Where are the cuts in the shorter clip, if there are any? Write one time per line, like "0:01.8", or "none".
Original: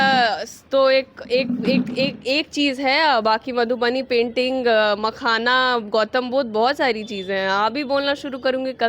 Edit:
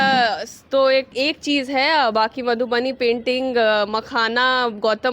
0:01.1